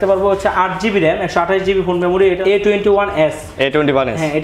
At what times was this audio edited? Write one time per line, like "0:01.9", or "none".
0:02.4